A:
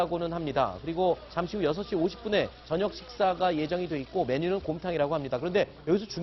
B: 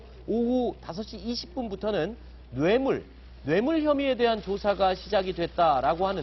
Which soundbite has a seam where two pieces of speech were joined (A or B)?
B